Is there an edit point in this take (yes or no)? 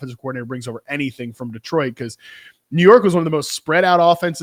no